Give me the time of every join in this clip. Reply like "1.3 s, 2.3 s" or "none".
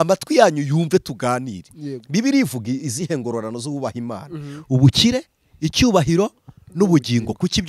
none